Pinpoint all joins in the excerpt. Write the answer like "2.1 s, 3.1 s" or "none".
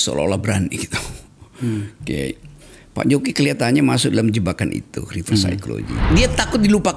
6.1 s